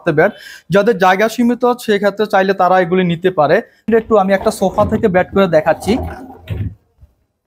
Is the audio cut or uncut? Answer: cut